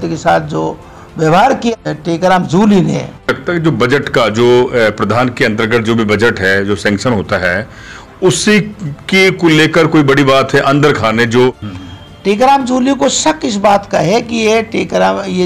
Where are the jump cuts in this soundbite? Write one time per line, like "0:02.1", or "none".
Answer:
0:01.7
0:03.3
0:11.7